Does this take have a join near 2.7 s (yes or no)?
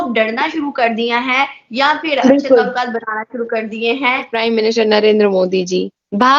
no